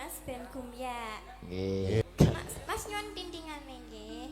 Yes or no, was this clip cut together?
yes